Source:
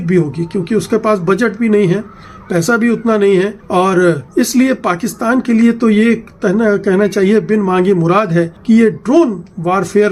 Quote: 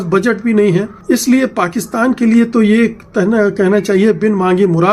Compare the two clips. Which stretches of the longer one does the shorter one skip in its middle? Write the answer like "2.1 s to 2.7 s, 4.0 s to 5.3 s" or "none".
2.1 s to 4.2 s